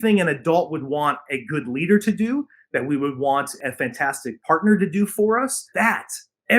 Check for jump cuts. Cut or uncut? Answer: cut